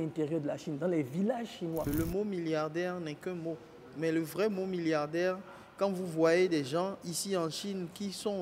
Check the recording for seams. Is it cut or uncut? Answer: cut